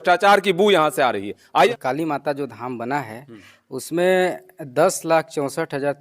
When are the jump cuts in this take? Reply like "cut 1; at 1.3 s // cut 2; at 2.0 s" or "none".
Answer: cut 1; at 1.7 s